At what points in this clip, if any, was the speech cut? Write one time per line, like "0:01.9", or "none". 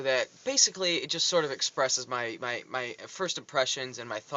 none